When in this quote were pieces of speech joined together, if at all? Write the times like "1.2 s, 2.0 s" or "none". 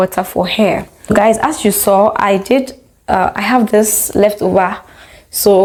none